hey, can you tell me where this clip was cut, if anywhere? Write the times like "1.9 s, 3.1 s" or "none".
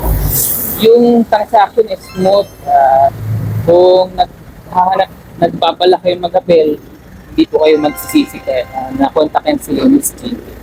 none